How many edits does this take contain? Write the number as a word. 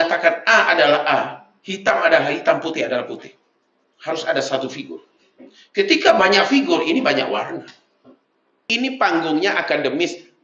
one